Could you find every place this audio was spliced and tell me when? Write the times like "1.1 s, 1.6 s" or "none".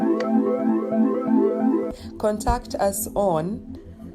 1.8 s